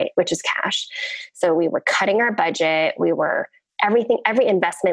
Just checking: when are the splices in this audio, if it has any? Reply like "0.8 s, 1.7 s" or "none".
none